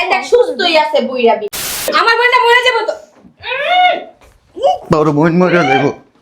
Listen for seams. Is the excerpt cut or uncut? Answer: cut